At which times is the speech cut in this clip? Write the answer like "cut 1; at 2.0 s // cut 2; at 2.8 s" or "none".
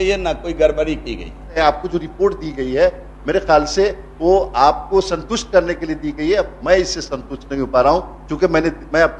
cut 1; at 1.6 s